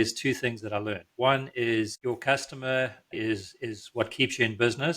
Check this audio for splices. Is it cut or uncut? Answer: cut